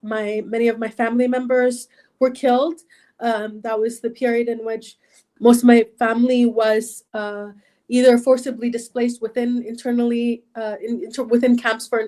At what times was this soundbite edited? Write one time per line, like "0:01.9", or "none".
0:05.2